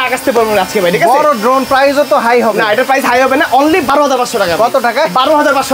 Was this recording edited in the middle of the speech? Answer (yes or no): no